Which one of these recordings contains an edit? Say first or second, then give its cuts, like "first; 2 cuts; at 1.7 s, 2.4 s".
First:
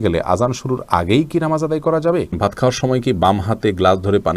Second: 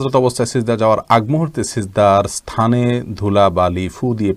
first; 1 cut; at 2.4 s